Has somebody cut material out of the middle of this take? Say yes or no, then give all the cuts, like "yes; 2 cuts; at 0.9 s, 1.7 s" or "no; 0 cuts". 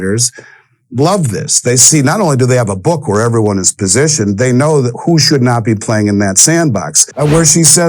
yes; 1 cut; at 7.0 s